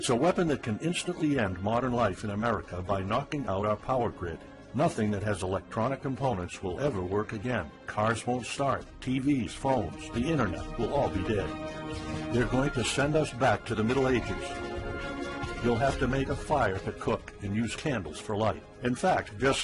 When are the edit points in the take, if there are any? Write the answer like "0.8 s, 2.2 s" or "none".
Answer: 18.0 s